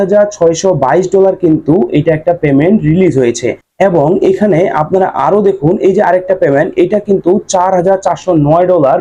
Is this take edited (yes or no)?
no